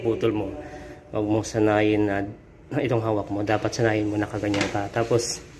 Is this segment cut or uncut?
uncut